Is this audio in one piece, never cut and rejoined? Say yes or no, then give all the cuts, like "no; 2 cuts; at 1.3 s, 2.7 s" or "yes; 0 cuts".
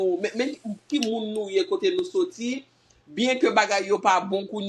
yes; 0 cuts